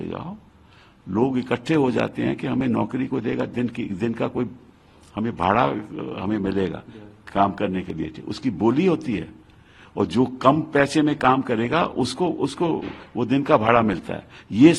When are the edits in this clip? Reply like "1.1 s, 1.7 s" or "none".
none